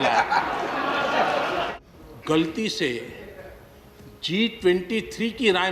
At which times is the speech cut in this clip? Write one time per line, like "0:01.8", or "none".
0:01.7